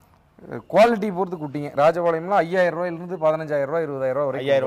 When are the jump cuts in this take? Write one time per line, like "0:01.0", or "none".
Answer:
none